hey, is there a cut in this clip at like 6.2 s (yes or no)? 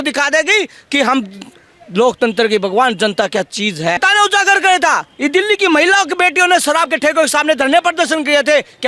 no